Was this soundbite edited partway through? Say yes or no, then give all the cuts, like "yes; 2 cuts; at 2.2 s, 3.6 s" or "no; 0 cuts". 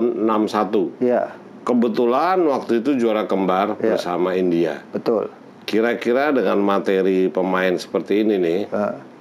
no; 0 cuts